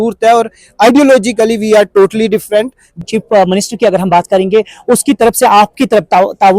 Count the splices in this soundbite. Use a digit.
1